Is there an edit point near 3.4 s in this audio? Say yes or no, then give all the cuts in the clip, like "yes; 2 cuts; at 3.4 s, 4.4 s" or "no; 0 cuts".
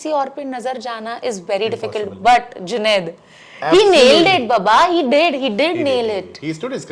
no; 0 cuts